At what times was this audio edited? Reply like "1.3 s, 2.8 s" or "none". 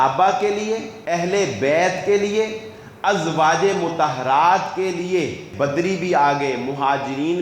0.9 s, 5.5 s